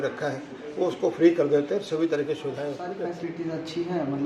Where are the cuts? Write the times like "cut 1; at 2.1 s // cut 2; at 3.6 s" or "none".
cut 1; at 2.9 s